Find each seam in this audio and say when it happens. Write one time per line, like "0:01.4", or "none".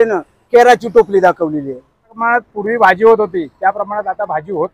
0:02.2